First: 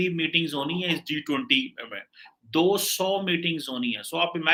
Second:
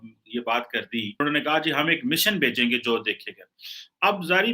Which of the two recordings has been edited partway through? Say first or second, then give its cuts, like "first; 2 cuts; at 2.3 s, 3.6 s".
second; 1 cut; at 1.2 s